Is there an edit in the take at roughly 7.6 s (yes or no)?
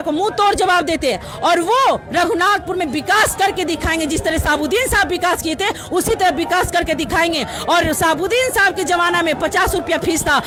no